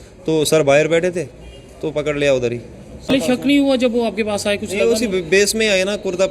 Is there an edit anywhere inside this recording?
yes; 1 cut; at 3.1 s

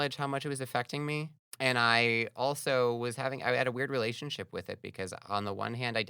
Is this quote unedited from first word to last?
no; 1 cut; at 1.4 s

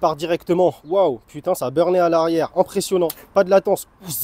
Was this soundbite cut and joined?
no; 0 cuts

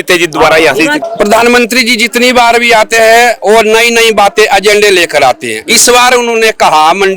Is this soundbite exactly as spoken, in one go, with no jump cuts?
no; 1 cut; at 1.0 s

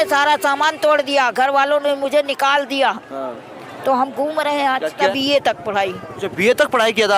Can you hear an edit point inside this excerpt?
yes; 1 cut; at 5.0 s

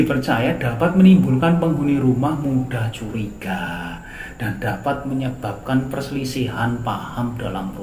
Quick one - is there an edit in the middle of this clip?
no; 0 cuts

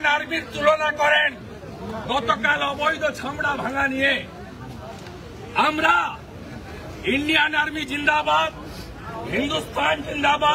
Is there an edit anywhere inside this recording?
no; 0 cuts

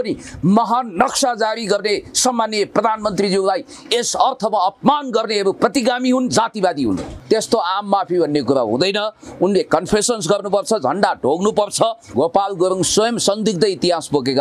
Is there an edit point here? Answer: yes; 2 cuts; at 7.1 s, 12.0 s

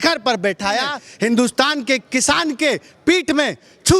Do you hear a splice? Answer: yes; 1 cut; at 1.0 s

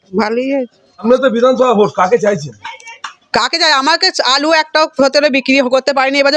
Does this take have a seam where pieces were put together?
yes; 1 cut; at 1.0 s

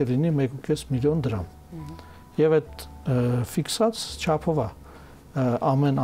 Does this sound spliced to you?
no; 0 cuts

